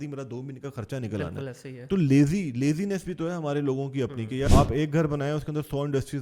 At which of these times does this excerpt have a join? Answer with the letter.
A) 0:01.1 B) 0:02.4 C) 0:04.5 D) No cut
C